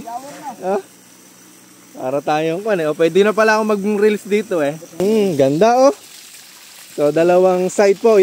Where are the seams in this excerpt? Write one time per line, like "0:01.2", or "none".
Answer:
0:05.0